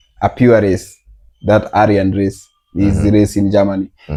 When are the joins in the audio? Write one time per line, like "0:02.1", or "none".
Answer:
none